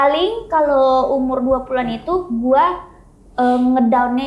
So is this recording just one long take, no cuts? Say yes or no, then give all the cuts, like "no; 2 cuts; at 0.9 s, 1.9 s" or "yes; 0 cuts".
yes; 0 cuts